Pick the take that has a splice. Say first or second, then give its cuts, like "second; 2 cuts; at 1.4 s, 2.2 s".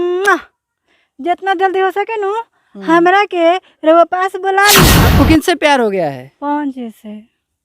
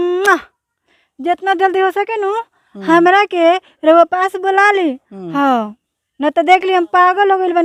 first; 1 cut; at 5.0 s